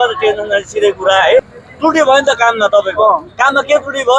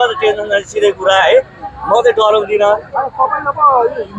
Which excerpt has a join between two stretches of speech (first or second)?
first